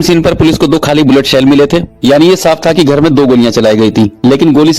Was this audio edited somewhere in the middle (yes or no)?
yes